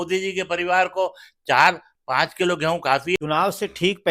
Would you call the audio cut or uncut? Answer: cut